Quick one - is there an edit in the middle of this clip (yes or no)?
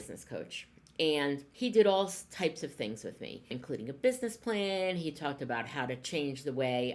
yes